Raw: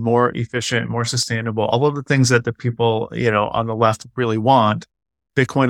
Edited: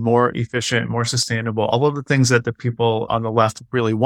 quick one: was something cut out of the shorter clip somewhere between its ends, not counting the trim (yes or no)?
yes